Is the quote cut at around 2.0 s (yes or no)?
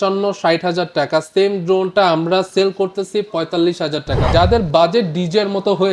no